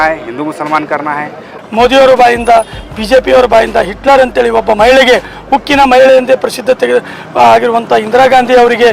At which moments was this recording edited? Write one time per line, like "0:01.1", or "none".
0:01.5